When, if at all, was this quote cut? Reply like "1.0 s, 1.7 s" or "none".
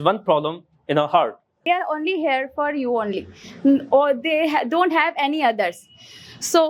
1.6 s